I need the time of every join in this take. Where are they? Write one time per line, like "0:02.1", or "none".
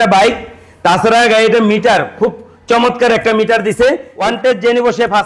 0:04.1